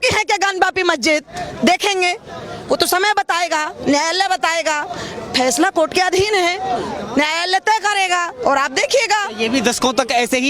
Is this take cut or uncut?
uncut